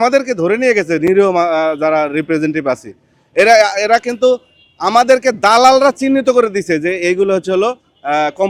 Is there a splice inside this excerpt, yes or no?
no